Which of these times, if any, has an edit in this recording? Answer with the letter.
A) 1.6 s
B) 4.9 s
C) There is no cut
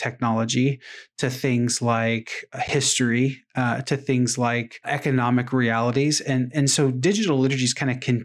B